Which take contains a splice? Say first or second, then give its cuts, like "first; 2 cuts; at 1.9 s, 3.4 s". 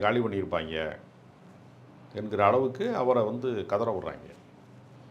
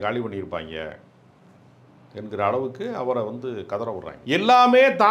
second; 1 cut; at 4.1 s